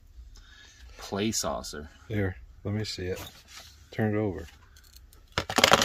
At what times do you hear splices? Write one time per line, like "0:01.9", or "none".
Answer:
none